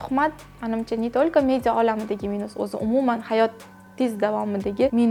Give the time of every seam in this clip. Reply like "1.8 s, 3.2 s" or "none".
none